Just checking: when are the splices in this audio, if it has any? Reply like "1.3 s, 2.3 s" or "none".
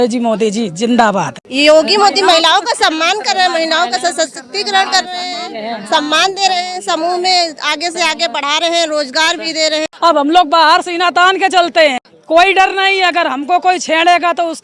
1.4 s, 9.9 s, 12.1 s